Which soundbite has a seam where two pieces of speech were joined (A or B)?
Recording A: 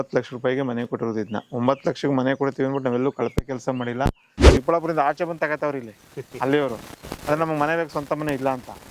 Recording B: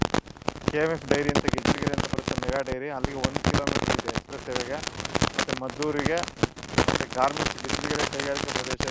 A